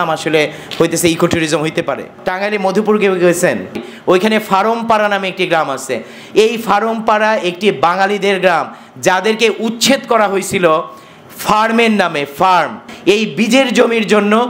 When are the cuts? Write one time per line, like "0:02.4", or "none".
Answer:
0:02.2
0:03.8
0:12.9